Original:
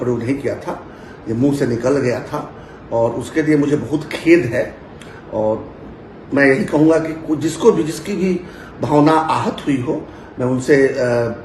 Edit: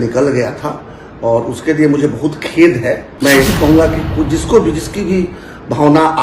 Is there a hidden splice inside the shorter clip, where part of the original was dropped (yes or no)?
yes